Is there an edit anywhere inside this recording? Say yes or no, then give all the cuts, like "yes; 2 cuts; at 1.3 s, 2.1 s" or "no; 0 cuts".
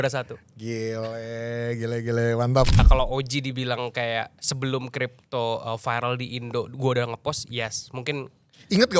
yes; 1 cut; at 2.9 s